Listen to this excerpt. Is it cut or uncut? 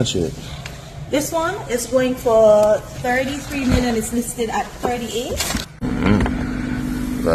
cut